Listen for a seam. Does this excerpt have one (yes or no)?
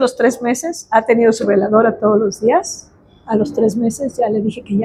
no